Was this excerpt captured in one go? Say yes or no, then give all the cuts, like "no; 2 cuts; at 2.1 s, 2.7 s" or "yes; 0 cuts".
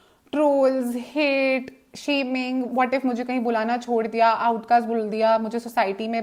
yes; 0 cuts